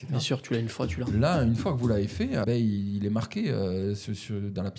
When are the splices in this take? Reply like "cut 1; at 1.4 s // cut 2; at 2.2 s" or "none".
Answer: cut 1; at 2.4 s